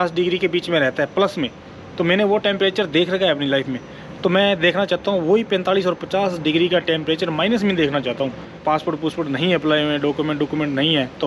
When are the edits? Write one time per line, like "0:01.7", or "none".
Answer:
0:08.5